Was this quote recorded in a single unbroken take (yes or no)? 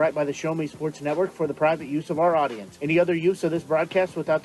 yes